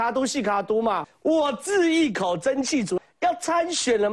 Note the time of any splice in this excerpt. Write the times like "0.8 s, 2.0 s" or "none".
1.1 s, 3.0 s